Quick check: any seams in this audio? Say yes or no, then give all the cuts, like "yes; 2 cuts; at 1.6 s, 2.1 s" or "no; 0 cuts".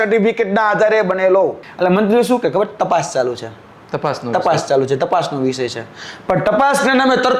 yes; 1 cut; at 1.6 s